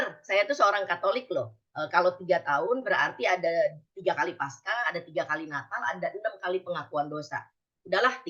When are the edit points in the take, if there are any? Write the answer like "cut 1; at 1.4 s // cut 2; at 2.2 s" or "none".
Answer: none